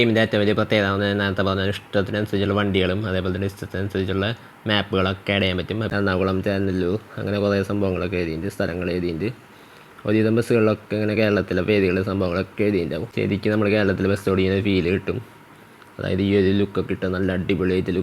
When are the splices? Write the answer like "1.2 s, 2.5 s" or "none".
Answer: 5.9 s, 13.1 s